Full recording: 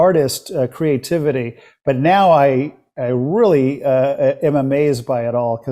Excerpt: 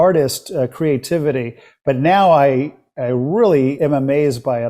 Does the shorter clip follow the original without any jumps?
no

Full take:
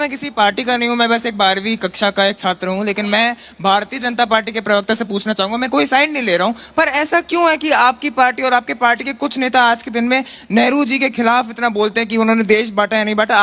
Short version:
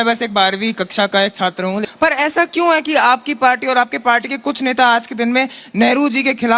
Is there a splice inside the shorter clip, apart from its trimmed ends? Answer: yes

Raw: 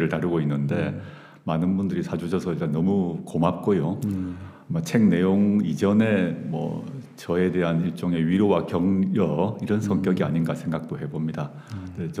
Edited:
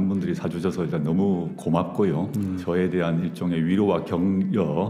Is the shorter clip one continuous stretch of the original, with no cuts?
no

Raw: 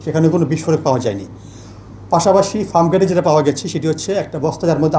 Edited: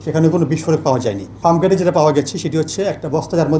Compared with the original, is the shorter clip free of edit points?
no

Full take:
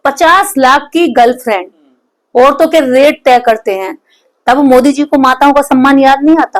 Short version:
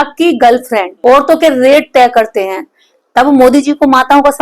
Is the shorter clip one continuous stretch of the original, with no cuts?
no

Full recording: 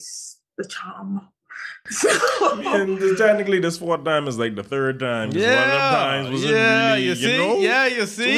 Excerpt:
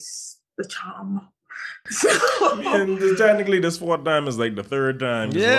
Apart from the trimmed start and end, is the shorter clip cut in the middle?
no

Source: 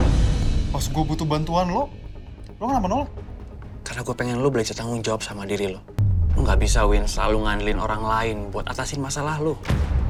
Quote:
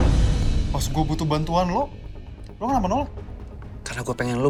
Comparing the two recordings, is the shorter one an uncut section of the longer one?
yes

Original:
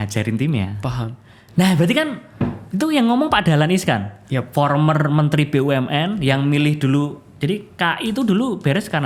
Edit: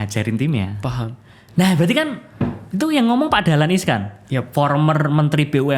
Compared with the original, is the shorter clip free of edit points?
yes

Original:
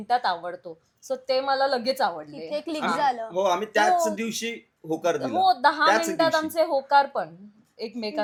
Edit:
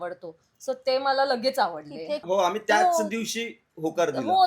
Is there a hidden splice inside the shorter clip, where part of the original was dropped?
yes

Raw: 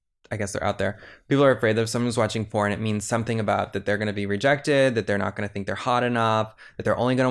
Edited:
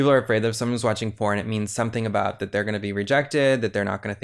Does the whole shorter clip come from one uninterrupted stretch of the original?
yes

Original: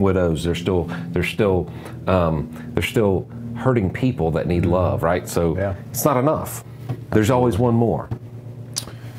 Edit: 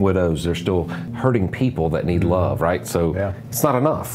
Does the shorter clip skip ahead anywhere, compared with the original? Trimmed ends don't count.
yes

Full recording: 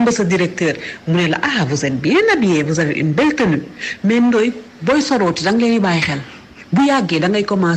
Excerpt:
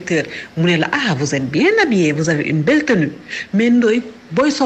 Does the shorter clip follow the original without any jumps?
yes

